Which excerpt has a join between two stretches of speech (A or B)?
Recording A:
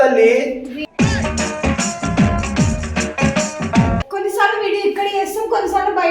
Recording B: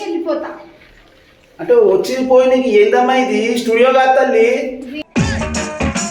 A